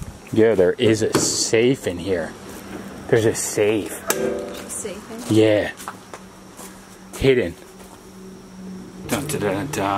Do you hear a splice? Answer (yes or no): yes